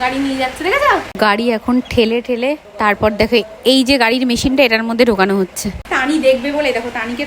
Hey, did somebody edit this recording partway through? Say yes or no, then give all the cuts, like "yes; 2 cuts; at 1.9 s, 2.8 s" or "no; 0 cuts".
yes; 3 cuts; at 1.2 s, 2.7 s, 5.9 s